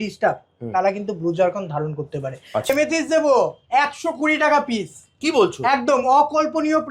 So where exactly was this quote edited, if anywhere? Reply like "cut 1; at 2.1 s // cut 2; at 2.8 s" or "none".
cut 1; at 2.6 s